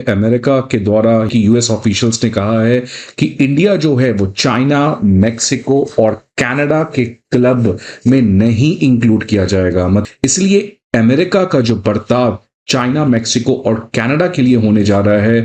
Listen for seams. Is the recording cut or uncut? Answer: cut